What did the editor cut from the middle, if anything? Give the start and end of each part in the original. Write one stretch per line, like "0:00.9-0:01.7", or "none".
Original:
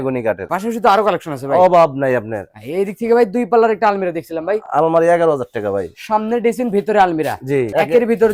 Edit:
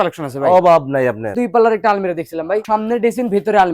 0:02.4-0:03.3
0:04.6-0:06.0